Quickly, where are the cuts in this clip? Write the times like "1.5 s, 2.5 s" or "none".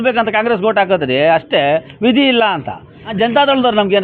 3.1 s